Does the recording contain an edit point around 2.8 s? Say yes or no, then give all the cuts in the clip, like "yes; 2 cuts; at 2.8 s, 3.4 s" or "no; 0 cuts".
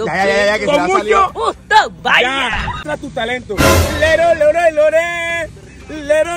yes; 1 cut; at 2.8 s